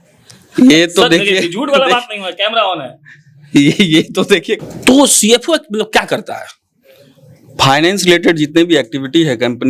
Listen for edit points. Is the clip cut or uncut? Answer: uncut